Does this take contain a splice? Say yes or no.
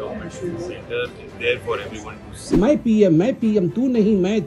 yes